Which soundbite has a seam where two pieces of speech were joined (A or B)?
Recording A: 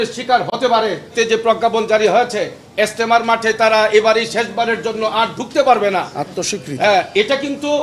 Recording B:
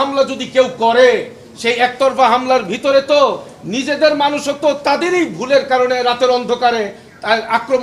A